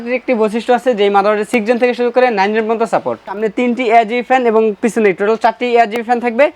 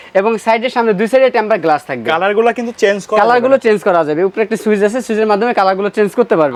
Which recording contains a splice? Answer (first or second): first